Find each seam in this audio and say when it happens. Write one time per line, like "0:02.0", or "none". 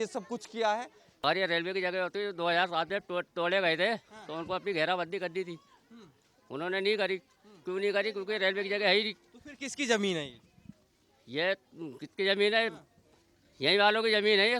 0:01.2